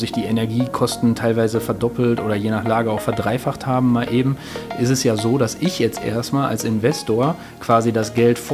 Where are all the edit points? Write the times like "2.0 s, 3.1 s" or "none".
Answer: none